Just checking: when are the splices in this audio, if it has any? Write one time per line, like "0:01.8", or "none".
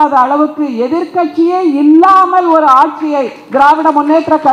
none